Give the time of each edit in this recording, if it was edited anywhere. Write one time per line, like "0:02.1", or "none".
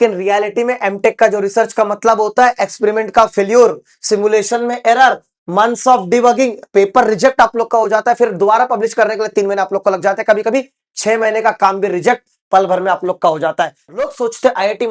0:13.8